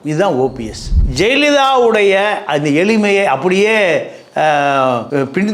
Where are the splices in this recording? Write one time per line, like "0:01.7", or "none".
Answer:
0:01.0